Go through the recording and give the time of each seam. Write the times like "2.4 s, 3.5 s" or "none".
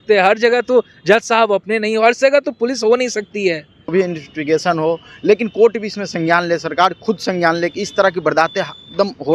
3.9 s